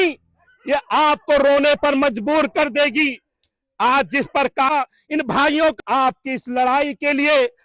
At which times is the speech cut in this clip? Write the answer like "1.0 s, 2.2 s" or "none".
4.7 s, 5.8 s

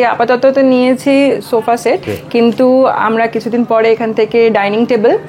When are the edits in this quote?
2.1 s

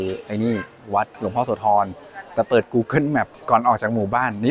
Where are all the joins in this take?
1.1 s, 3.4 s

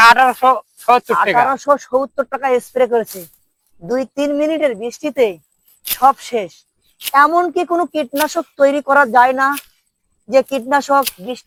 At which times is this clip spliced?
none

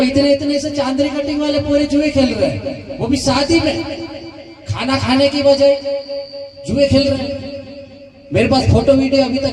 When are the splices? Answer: none

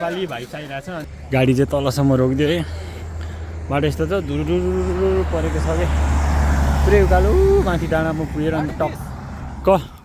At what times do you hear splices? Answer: 1.1 s

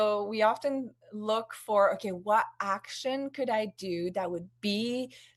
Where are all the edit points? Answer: none

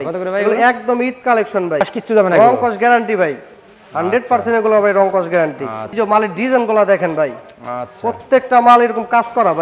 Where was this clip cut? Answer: 1.9 s, 5.9 s

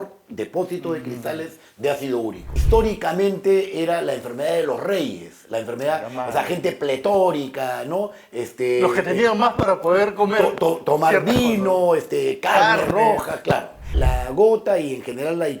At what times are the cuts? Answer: 2.5 s, 13.9 s

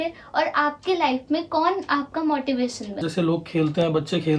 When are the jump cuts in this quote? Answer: 3.0 s

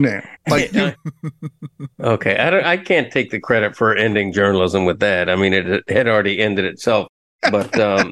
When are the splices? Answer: 7.2 s

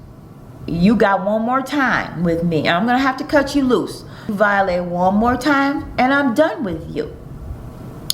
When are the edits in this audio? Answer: 4.3 s

